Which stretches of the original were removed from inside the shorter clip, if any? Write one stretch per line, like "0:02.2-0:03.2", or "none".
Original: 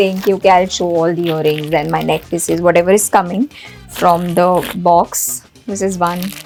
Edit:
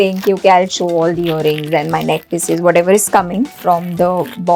0:03.5-0:03.9